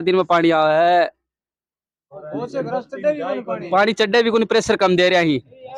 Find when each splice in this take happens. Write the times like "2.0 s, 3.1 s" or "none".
none